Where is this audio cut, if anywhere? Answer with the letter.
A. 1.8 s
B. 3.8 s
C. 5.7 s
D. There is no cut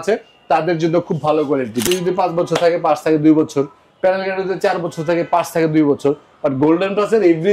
A